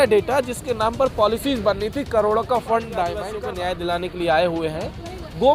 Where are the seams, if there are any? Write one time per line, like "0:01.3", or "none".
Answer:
0:03.3